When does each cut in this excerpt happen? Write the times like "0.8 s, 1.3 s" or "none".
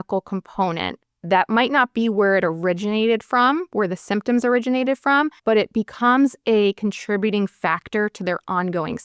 5.3 s